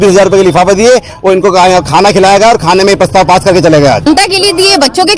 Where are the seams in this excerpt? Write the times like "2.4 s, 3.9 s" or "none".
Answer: 4.1 s